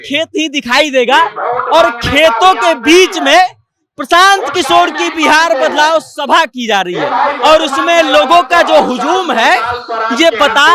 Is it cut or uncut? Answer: uncut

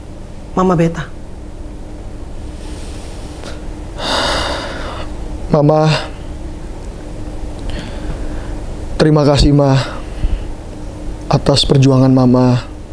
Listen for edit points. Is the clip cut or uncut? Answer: uncut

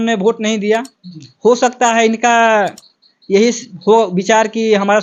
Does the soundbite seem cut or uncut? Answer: uncut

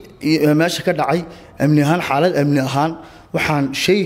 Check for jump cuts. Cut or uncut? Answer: uncut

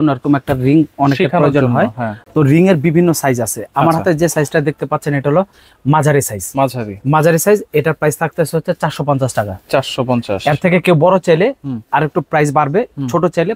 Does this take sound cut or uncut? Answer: uncut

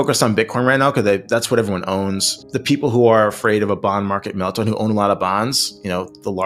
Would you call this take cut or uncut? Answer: uncut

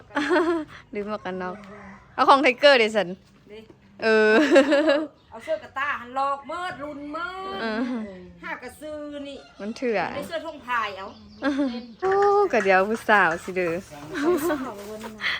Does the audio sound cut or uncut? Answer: cut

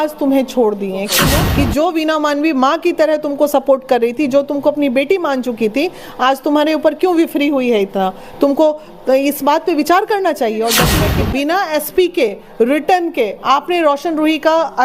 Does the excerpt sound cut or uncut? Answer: cut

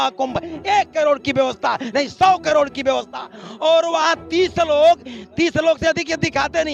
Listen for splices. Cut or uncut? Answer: uncut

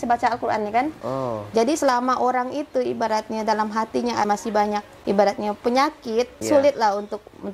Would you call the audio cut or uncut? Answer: cut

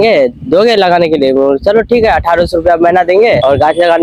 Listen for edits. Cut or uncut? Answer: uncut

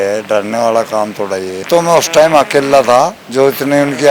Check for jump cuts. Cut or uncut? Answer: cut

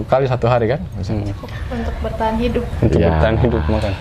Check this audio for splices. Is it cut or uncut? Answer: uncut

